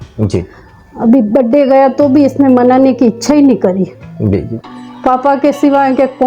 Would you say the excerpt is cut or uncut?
uncut